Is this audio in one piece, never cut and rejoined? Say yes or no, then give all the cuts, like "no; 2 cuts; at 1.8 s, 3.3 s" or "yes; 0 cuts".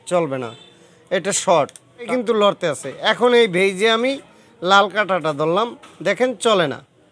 no; 1 cut; at 2.1 s